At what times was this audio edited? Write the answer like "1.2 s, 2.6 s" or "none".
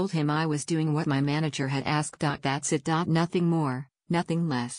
2.3 s